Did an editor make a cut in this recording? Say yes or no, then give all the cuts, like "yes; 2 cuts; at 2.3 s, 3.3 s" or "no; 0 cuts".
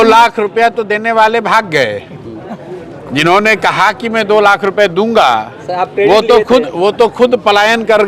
no; 0 cuts